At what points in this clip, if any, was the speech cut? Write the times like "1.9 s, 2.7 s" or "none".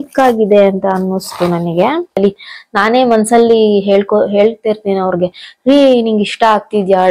2.2 s